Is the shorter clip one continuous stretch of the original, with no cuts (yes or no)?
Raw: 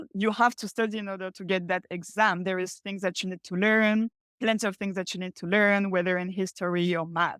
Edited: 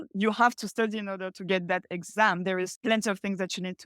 no